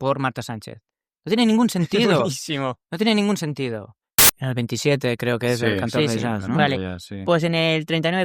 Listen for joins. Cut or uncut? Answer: cut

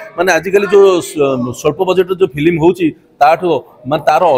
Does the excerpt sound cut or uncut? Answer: uncut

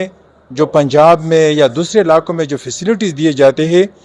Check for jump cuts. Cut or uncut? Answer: uncut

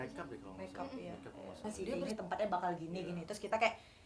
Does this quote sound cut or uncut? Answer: cut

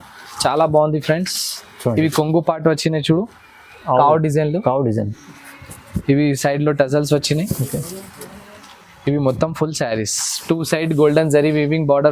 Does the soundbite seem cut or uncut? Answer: uncut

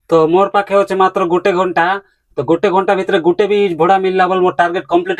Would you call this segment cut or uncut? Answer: uncut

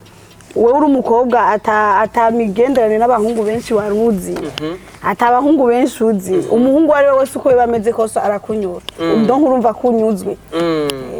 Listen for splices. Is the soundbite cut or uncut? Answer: uncut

